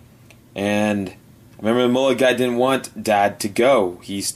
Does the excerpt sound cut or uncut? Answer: uncut